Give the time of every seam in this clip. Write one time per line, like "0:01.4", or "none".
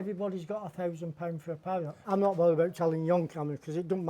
0:02.0